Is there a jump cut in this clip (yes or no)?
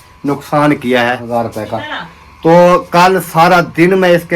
yes